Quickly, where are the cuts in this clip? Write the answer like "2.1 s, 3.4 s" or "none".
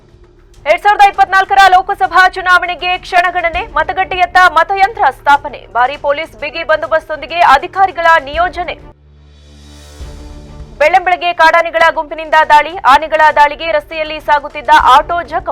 none

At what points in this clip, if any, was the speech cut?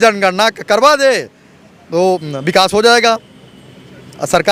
none

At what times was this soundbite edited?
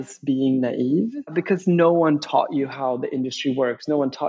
1.4 s

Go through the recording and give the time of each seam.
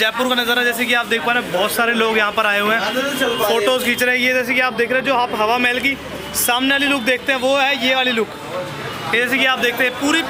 none

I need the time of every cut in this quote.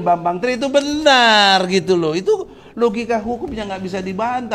none

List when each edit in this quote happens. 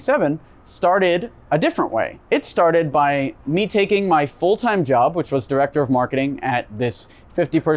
1.3 s, 2.2 s

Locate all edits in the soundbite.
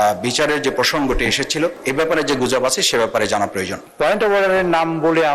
1.8 s, 3.8 s

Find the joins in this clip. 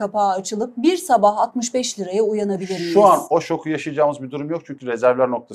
none

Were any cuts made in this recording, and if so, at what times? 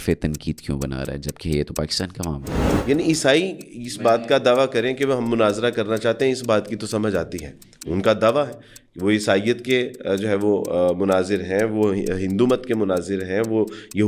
2.7 s

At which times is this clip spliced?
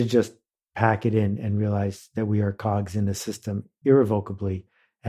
3.7 s

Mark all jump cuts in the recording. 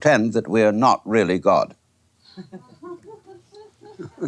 3.2 s

